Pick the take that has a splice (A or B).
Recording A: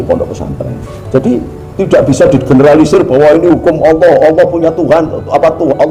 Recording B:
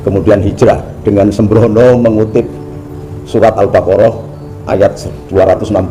A